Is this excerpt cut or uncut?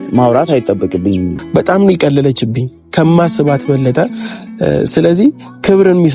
cut